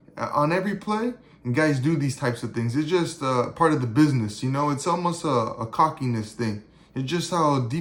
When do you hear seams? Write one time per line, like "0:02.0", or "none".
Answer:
none